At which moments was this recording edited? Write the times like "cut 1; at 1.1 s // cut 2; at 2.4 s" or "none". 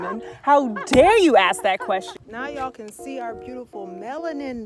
cut 1; at 2.1 s